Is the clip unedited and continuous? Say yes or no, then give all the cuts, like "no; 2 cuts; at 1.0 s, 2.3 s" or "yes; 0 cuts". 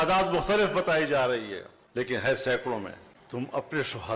yes; 0 cuts